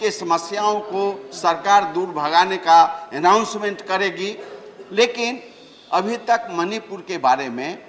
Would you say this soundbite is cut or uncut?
uncut